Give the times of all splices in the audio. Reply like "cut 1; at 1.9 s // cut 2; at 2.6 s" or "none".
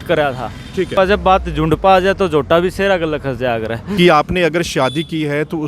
cut 1; at 1.0 s // cut 2; at 3.9 s